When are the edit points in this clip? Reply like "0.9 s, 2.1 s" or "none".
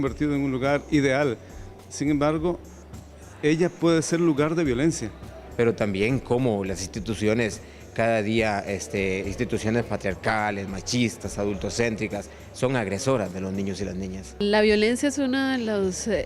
5.5 s, 14.4 s